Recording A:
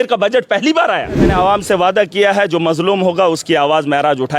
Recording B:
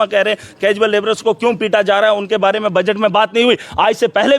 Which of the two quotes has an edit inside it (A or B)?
A